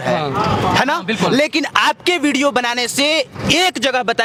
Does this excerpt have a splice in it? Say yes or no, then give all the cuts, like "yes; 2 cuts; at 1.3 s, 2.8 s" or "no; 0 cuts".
no; 0 cuts